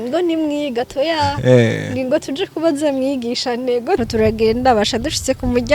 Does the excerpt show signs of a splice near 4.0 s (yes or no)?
yes